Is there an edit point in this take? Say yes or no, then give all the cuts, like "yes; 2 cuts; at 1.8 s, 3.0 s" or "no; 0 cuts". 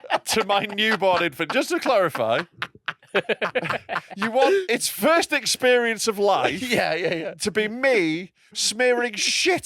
yes; 1 cut; at 4.6 s